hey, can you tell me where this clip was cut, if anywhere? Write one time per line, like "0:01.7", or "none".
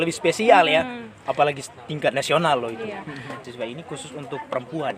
0:03.4